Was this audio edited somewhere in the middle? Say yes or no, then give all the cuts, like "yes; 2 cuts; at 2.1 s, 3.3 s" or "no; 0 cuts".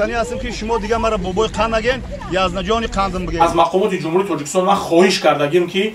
yes; 1 cut; at 3.4 s